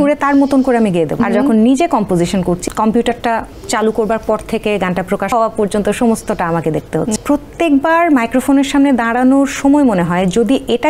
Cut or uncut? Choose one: cut